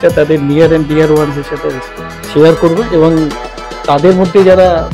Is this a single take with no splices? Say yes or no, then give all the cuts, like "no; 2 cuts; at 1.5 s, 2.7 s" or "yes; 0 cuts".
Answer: yes; 0 cuts